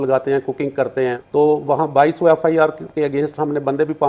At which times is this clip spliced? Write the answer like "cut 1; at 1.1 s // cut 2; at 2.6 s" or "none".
cut 1; at 1.2 s